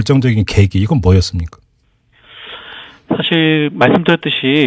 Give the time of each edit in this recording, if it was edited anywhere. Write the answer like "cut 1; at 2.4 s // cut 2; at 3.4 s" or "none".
cut 1; at 1.0 s